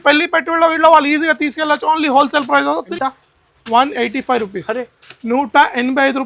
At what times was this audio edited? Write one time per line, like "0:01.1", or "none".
0:02.9